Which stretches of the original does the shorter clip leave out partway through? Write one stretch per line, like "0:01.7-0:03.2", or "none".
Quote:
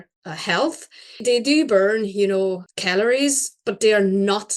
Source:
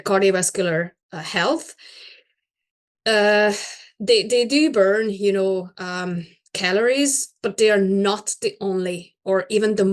0:02.1-0:04.3
0:05.8-0:06.5